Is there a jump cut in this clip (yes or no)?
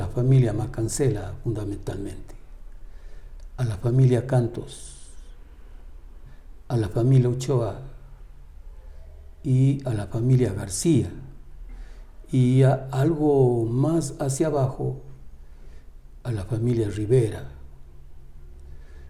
no